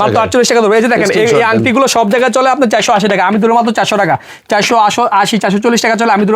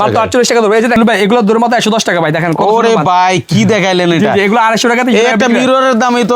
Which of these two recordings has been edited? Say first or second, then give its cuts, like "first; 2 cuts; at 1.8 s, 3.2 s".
second; 1 cut; at 1.0 s